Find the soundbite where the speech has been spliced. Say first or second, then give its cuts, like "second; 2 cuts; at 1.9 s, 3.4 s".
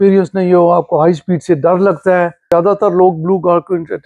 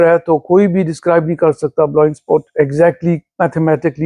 first; 1 cut; at 2.5 s